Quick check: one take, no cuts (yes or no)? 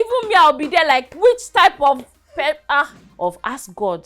no